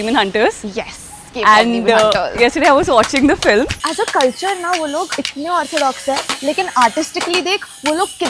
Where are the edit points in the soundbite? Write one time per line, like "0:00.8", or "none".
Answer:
0:03.8
0:05.1